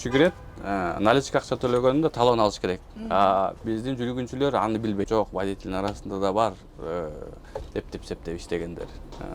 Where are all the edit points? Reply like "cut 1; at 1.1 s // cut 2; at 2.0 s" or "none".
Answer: cut 1; at 5.1 s